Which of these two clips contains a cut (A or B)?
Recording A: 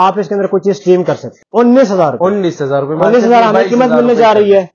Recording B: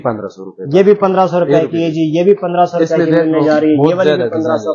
A